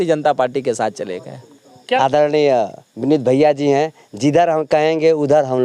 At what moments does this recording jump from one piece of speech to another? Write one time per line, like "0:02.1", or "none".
0:01.6